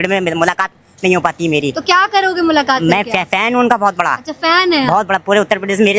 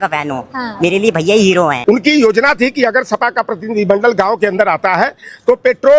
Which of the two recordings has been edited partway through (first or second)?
second